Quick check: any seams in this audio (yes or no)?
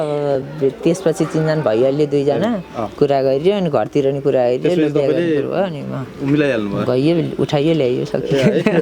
no